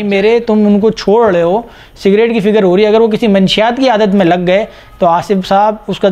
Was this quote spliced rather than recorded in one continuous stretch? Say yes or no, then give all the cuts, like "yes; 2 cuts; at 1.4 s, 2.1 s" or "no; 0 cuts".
no; 0 cuts